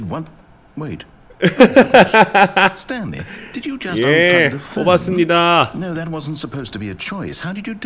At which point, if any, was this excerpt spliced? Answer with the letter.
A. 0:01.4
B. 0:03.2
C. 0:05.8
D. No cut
D